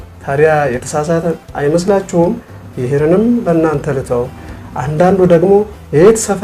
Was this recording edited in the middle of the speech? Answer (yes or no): no